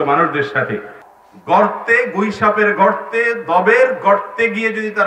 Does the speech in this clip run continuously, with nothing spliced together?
no; 1 cut; at 1.0 s

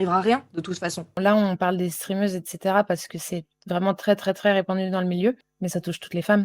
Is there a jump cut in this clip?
yes; 2 cuts; at 1.1 s, 5.5 s

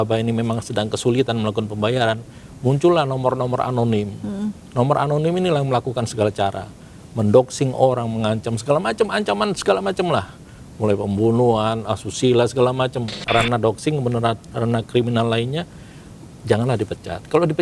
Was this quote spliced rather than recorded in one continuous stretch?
yes; 1 cut; at 13.2 s

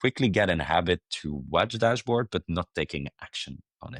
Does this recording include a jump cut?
no; 0 cuts

